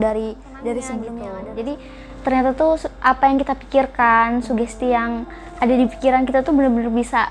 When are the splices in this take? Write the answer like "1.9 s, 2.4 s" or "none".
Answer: 1.2 s